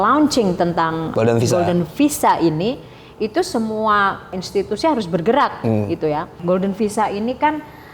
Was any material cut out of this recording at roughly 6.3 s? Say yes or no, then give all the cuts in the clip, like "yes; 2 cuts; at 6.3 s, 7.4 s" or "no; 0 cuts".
yes; 3 cuts; at 1.1 s, 4.4 s, 6.3 s